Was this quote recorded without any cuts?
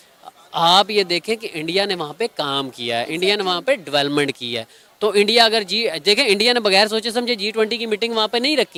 yes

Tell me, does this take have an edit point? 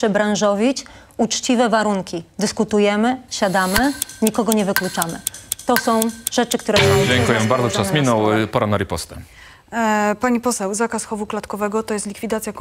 no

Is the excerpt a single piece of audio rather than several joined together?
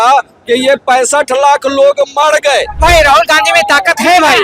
no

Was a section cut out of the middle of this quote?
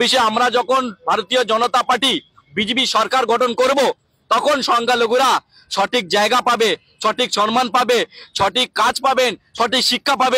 no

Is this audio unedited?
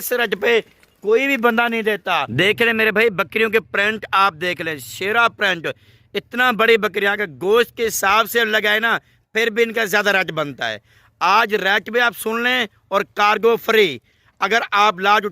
no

